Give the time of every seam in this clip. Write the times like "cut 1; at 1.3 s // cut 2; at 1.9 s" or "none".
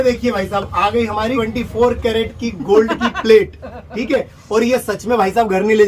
none